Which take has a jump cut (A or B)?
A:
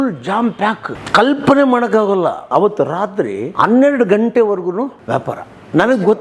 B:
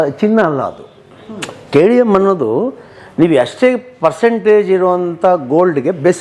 A